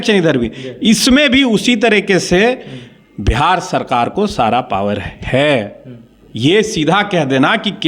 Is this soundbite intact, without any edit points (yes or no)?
yes